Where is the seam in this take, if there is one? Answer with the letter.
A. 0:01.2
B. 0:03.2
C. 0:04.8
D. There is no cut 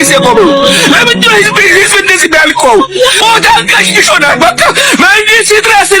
B